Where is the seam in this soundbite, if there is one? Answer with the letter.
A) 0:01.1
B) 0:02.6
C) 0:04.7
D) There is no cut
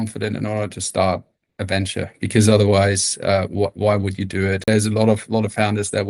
C